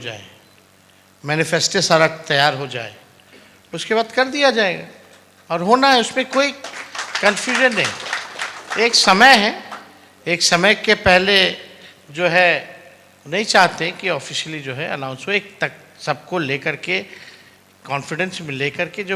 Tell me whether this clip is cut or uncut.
uncut